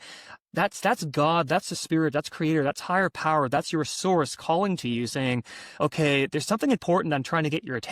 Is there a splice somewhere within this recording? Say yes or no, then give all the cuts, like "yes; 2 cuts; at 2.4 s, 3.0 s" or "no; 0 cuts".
no; 0 cuts